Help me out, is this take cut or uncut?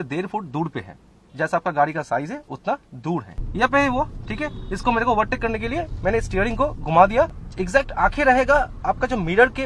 cut